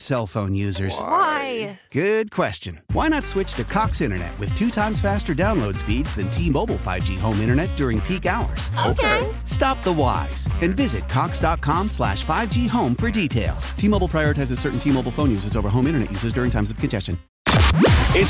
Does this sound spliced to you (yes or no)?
yes